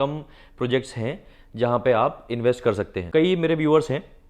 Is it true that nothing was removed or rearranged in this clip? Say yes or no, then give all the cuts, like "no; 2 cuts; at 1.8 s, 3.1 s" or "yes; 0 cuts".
no; 1 cut; at 3.0 s